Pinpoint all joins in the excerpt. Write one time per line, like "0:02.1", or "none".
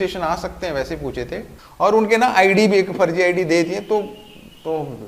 0:01.6